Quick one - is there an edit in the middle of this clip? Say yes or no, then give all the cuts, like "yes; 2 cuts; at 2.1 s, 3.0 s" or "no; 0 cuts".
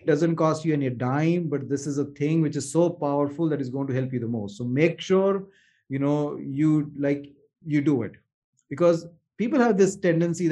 no; 0 cuts